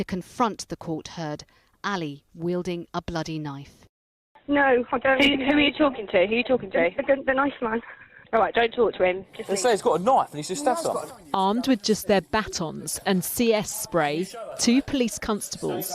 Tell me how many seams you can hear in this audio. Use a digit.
1